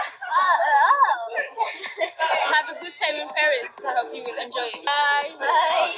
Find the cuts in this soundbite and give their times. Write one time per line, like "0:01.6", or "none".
0:04.9